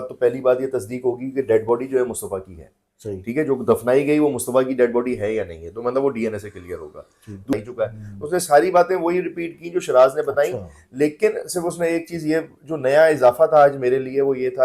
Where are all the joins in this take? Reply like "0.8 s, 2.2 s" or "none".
7.5 s